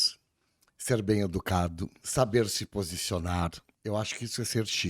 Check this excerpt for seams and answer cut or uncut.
cut